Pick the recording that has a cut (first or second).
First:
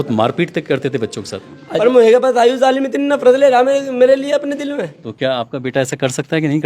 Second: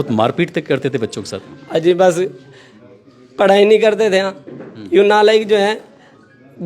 first